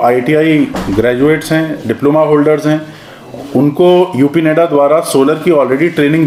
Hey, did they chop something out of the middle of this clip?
no; 0 cuts

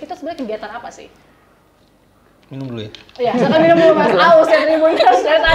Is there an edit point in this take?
no; 0 cuts

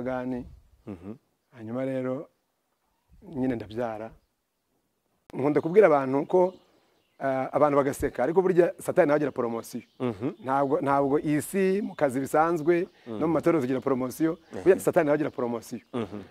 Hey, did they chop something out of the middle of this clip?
yes; 1 cut; at 5.2 s

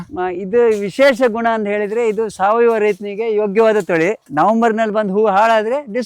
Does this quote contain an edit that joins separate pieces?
yes; 1 cut; at 4.3 s

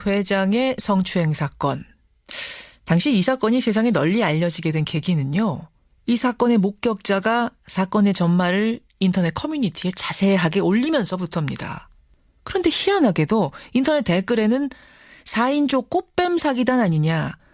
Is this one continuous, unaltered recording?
yes; 0 cuts

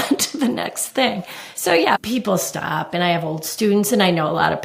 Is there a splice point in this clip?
yes; 1 cut; at 2.0 s

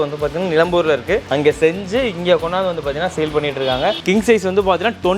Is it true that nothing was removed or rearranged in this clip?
no; 1 cut; at 4.0 s

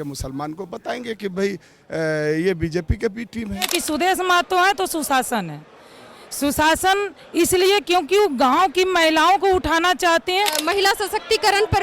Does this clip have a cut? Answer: yes; 2 cuts; at 3.8 s, 10.6 s

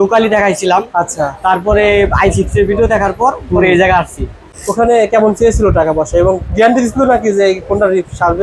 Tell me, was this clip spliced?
no; 0 cuts

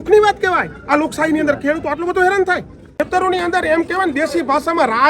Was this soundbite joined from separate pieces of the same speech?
yes; 1 cut; at 3.0 s

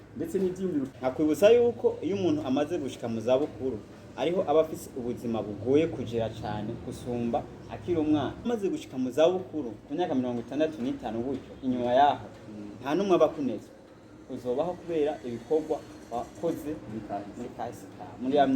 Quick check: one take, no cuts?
no; 2 cuts; at 0.9 s, 8.5 s

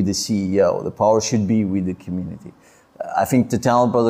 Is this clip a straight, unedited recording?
yes; 0 cuts

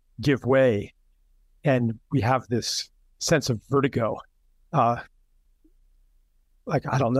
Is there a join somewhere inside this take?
no; 0 cuts

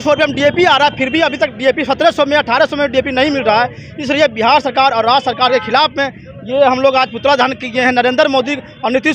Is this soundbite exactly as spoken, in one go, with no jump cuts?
yes; 0 cuts

